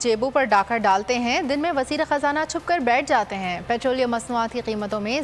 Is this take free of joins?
yes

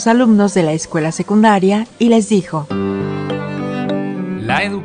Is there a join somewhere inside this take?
no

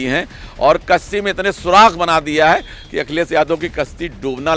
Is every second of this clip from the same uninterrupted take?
yes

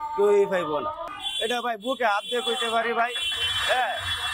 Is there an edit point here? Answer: yes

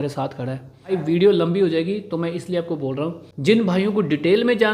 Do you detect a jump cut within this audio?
yes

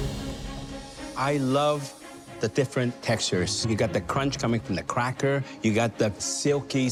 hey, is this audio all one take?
yes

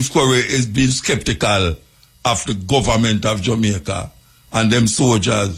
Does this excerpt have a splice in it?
no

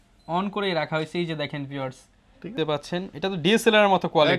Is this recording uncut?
no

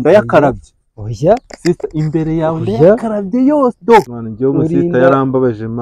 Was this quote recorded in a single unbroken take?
no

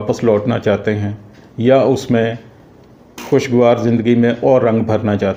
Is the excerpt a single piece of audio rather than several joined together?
yes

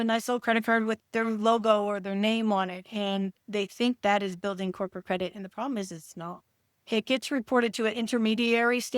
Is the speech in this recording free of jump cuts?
yes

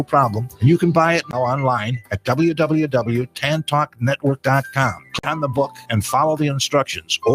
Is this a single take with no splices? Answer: no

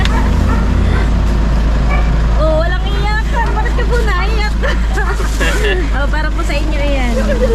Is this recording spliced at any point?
no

